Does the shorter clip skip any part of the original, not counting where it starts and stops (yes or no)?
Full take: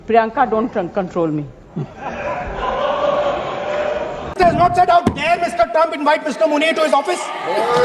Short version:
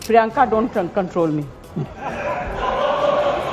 no